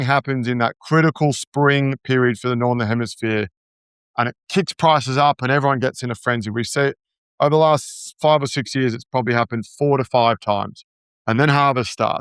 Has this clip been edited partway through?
no; 0 cuts

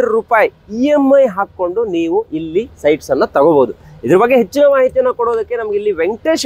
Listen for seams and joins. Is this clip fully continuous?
yes; 0 cuts

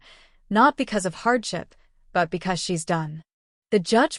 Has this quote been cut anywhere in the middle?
no; 0 cuts

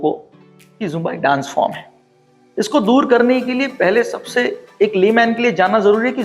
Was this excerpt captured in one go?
yes; 0 cuts

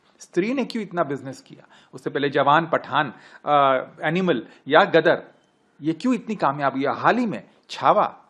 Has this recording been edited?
no; 0 cuts

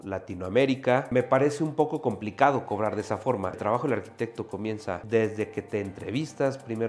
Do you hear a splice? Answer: yes; 3 cuts; at 1.1 s, 3.6 s, 5.0 s

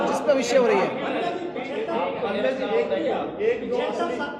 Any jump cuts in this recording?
no; 0 cuts

